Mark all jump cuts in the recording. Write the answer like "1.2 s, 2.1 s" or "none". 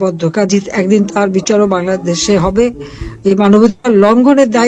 none